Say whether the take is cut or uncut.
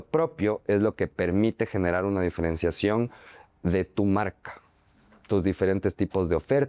uncut